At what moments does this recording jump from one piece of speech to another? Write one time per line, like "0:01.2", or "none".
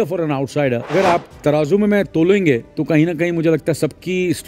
0:00.9
0:02.7

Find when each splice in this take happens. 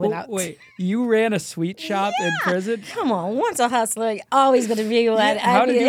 0:03.0

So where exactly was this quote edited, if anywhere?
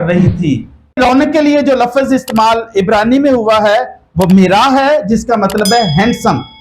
0:01.0

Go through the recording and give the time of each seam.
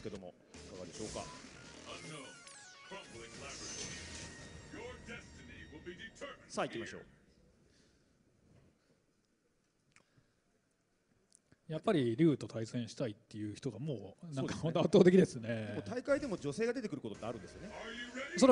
0:02.3

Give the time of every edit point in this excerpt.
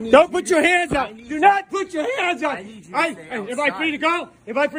none

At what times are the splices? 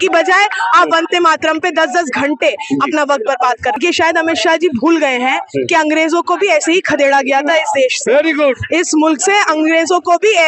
0:03.8

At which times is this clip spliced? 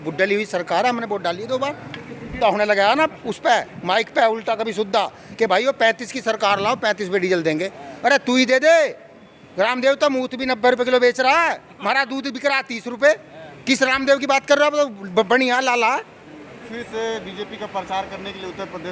0:02.3
0:16.7

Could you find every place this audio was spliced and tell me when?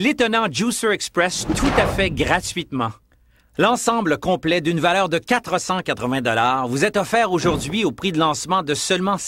0:03.1

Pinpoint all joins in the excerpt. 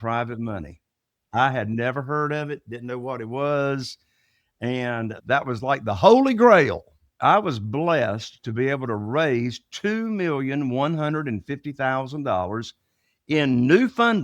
0:05.2
0:07.1

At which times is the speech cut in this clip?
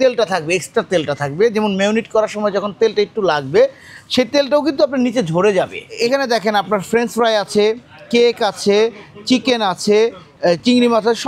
0:05.8
0:10.3

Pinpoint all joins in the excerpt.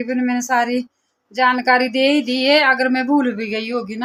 none

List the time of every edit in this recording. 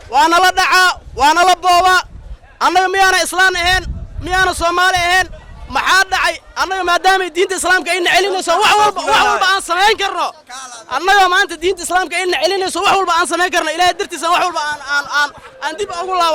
none

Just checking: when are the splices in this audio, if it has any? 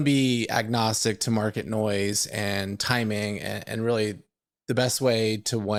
none

